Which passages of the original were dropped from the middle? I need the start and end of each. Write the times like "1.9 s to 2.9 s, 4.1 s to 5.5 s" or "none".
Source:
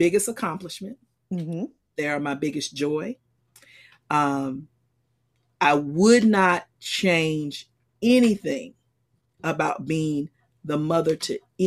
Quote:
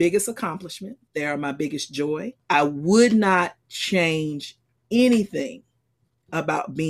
1.0 s to 1.8 s, 3.2 s to 5.4 s